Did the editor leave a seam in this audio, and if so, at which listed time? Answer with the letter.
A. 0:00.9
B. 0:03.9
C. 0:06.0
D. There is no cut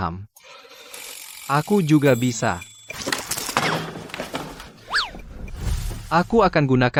D